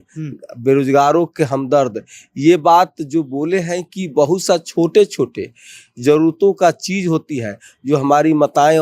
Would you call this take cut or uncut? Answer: uncut